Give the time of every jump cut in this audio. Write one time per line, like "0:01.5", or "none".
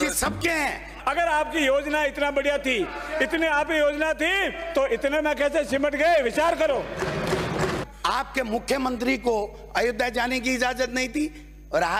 0:00.9
0:07.9